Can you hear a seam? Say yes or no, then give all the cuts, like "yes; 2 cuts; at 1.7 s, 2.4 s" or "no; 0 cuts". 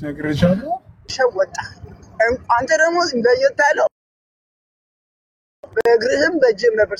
yes; 1 cut; at 1.1 s